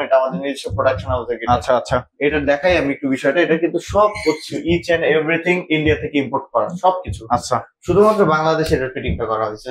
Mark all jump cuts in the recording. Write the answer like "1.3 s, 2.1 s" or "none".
none